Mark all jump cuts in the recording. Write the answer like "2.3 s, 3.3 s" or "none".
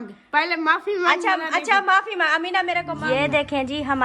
2.9 s